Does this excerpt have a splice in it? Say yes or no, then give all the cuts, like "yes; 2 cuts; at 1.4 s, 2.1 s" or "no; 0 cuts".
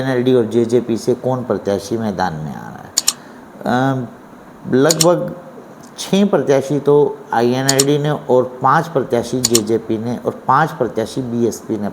no; 0 cuts